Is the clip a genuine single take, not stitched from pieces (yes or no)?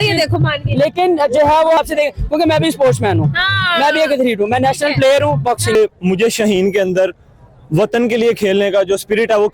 no